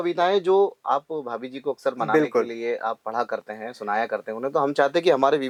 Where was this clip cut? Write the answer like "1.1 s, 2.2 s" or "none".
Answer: none